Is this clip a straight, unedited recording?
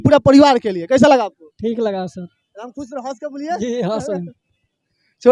yes; 0 cuts

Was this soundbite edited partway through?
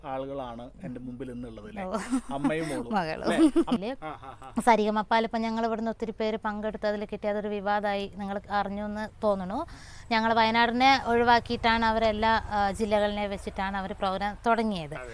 yes; 1 cut; at 3.8 s

